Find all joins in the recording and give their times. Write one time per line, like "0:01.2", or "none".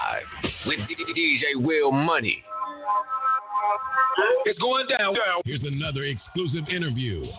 0:04.4

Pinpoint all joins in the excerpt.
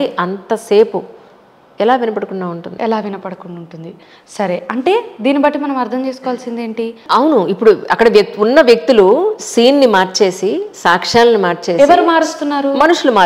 0:07.0

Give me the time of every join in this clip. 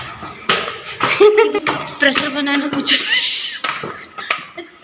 0:01.5

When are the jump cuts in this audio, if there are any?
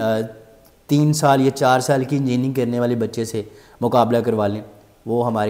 none

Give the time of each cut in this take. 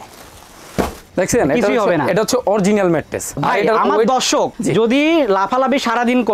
0:01.0
0:03.3

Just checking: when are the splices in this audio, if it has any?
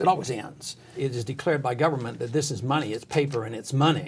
0:00.9

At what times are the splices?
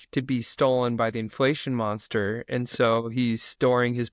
none

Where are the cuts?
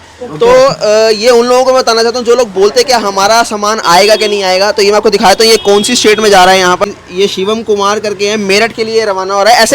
0:06.8

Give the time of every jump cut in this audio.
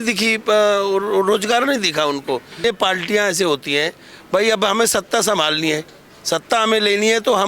0:02.6

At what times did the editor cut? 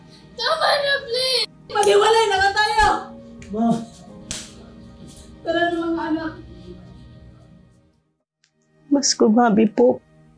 0:08.1

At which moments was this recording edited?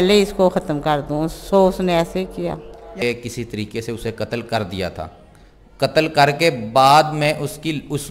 0:03.0

